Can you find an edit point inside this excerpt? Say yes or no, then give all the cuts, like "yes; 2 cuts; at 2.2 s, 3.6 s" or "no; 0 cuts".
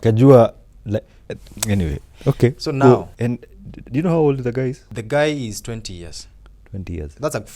yes; 2 cuts; at 3.1 s, 4.9 s